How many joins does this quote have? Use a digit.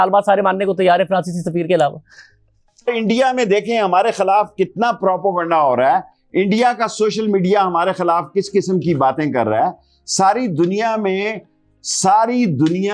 1